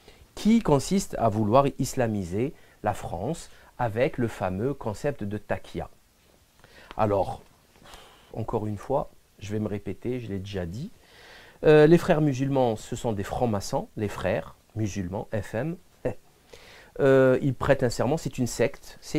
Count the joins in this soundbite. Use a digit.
1